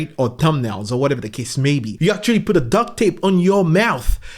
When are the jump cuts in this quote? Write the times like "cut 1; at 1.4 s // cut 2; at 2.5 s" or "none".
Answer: cut 1; at 1.9 s